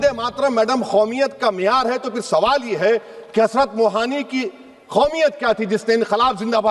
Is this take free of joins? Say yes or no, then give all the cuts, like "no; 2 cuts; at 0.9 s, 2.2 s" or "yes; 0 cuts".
yes; 0 cuts